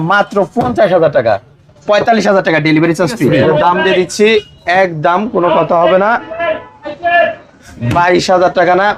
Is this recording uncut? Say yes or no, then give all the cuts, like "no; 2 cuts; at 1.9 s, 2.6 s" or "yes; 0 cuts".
no; 1 cut; at 3.4 s